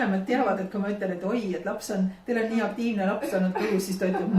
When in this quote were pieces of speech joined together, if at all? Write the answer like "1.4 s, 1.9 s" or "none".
none